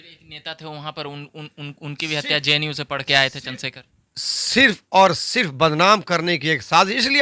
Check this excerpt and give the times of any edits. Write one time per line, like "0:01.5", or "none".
none